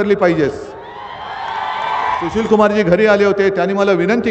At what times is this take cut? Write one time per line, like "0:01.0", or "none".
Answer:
0:02.3